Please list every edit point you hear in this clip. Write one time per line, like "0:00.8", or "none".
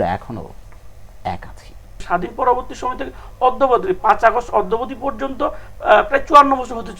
0:02.0